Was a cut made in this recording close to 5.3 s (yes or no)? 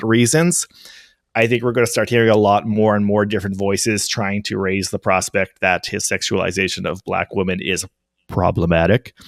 no